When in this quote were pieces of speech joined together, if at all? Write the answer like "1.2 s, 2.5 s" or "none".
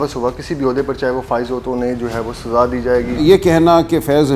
3.2 s